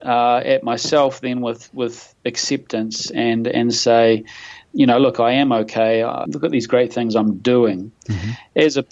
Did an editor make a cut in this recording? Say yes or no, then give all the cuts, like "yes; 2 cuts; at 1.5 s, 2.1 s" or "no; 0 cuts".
yes; 2 cuts; at 4.6 s, 6.2 s